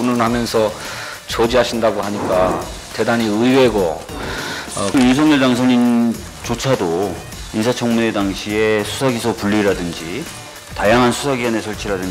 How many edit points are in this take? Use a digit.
1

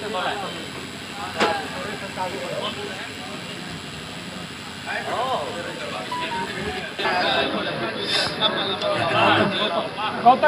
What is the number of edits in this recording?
1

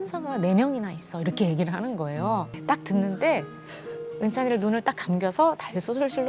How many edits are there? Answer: 1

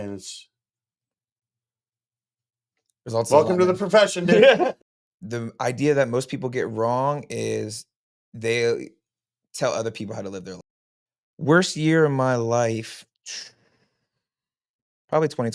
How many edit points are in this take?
2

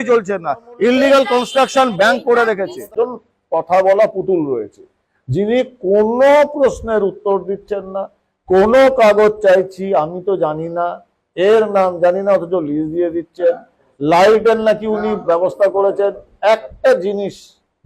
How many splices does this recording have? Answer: 1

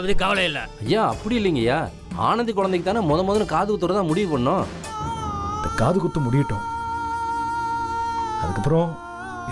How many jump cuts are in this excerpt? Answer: 1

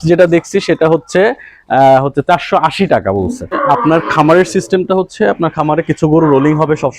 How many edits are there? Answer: 1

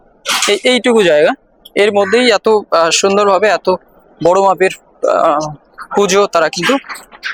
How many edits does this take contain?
0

